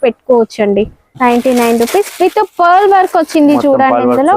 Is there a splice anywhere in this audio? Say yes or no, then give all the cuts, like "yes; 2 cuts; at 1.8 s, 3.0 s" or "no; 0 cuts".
yes; 1 cut; at 1.0 s